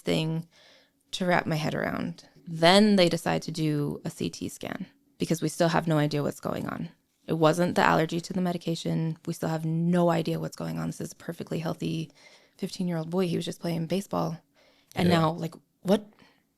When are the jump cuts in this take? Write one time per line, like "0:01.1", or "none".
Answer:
0:02.3
0:05.0